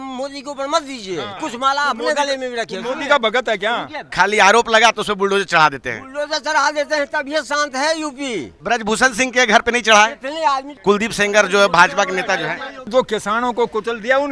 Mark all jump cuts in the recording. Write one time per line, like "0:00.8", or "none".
0:04.1
0:08.5
0:10.7
0:12.7